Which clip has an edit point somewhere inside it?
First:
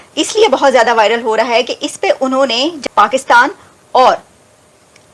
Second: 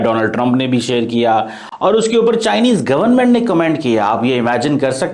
first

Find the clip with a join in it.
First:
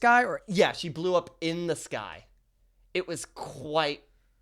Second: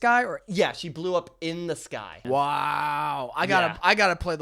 second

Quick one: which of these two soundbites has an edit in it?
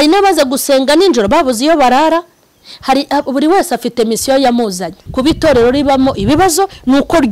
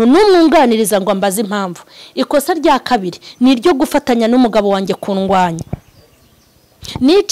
first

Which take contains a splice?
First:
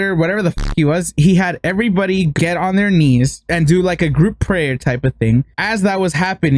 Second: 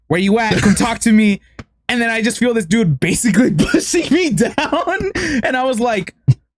first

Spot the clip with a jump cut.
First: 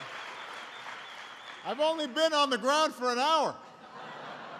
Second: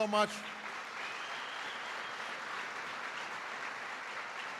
second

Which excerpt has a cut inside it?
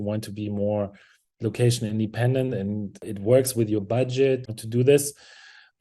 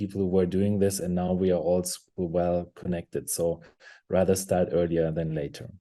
first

